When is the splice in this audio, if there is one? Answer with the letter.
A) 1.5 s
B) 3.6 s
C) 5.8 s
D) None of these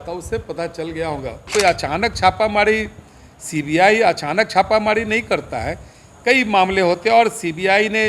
A